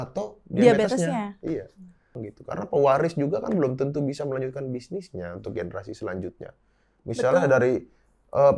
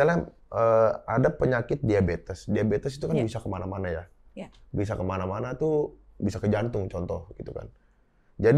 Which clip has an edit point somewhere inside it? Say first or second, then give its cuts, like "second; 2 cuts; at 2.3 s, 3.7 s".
first; 1 cut; at 2.3 s